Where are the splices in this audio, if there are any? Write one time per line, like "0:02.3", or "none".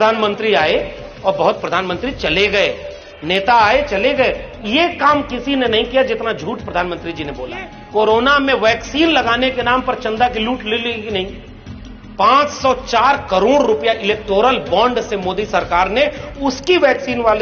0:07.8

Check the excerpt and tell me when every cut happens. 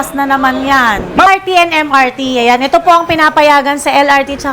0:01.3

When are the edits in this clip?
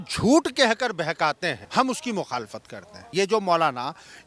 0:01.6
0:03.0

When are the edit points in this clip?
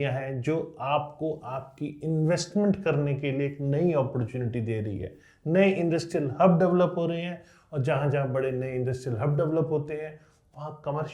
none

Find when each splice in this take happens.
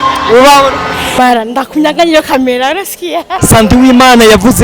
0:01.2
0:03.3

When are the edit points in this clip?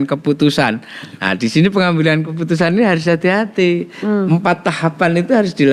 none

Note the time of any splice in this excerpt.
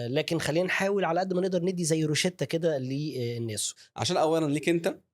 0:03.8

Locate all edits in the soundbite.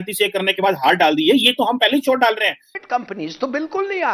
0:02.7

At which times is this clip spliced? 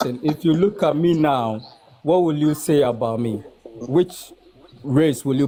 none

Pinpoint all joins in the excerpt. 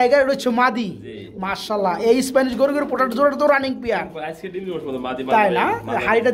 none

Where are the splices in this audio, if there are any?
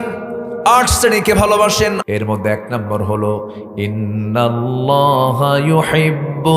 0:02.0

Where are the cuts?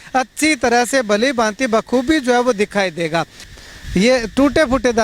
0:03.4

